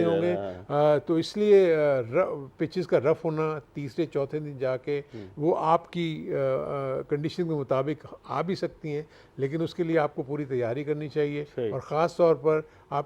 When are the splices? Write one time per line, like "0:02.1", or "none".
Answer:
none